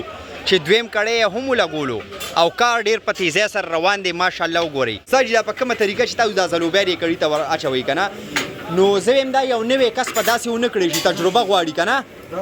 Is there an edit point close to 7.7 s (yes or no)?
no